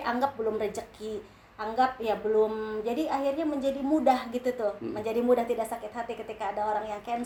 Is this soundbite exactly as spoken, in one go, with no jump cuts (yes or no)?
yes